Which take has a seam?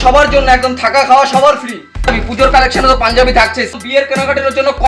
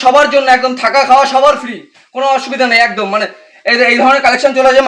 first; 2 cuts; at 2.1 s, 3.8 s

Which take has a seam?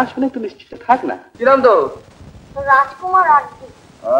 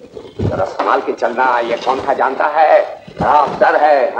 first; 1 cut; at 1.2 s

